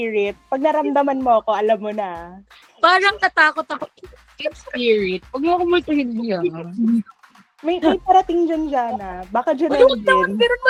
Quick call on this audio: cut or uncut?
uncut